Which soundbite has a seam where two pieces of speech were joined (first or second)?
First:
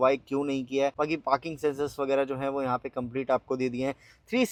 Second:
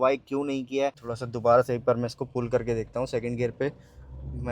second